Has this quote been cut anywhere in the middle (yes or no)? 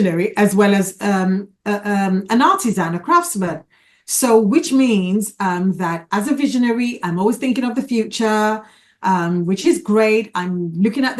no